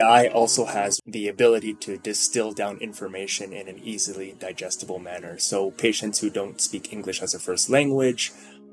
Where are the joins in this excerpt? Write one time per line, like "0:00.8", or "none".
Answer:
0:01.0